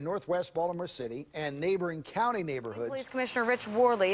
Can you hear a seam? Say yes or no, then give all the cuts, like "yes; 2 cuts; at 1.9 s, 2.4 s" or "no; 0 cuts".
yes; 1 cut; at 3.1 s